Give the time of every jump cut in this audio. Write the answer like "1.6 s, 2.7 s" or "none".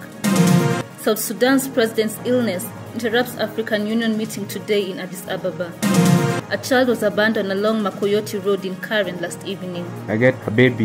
9.9 s

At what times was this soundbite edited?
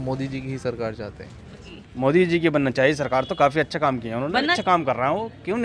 1.8 s, 4.6 s

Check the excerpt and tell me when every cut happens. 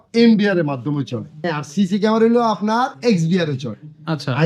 1.5 s

